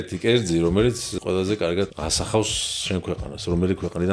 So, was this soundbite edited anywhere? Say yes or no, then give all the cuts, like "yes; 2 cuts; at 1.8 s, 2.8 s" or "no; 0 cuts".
yes; 2 cuts; at 1.1 s, 1.9 s